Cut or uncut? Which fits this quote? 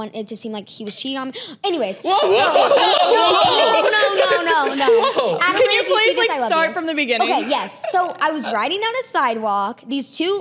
uncut